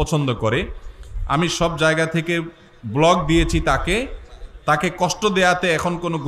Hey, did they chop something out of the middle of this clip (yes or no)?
no